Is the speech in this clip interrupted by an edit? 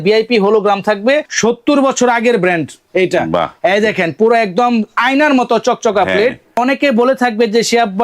yes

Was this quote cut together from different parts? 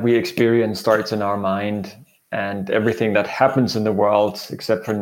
no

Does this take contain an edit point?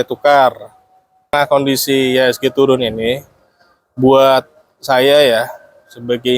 yes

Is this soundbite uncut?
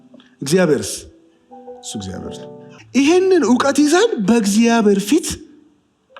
no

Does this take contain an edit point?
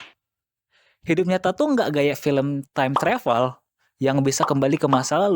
no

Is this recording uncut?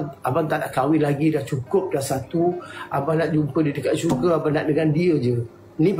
yes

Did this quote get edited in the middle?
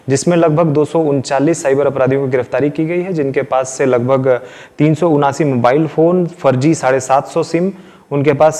no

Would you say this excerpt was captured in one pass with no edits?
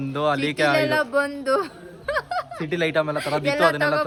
yes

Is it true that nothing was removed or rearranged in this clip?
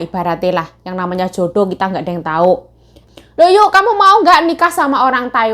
no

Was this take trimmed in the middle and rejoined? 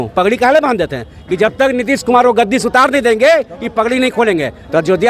no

